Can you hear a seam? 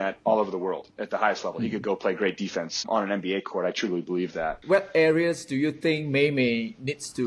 yes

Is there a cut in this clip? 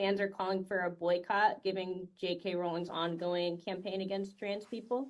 no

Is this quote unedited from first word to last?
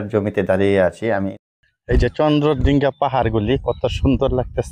no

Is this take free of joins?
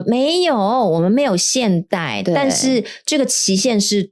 yes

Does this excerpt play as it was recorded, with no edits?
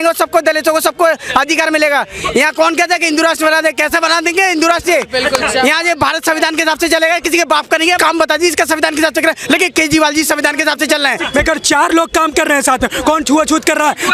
no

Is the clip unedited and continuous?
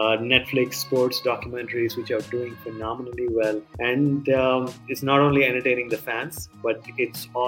no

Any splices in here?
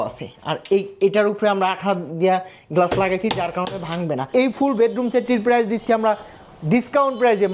yes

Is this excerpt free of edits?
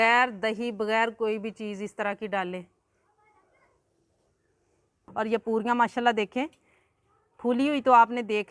no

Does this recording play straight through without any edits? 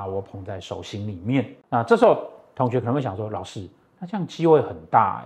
yes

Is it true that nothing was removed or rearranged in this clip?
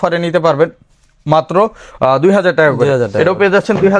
yes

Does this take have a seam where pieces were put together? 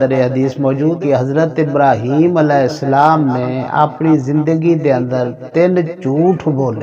yes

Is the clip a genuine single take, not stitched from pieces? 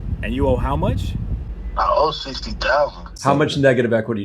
no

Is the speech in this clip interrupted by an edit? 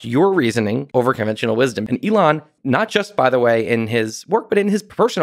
yes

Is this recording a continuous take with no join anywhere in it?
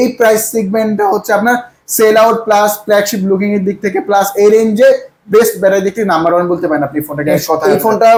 yes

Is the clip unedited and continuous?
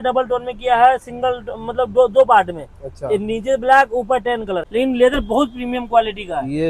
no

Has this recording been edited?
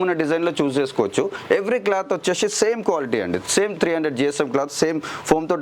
no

